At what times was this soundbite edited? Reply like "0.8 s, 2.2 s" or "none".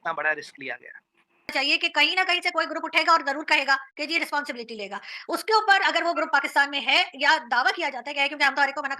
1.5 s